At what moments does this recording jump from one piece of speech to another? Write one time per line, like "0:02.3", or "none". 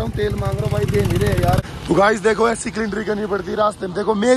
0:01.6